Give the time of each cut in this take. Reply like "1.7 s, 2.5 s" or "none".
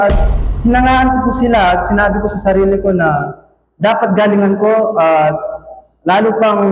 none